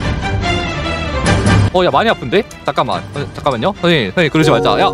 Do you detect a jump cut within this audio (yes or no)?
no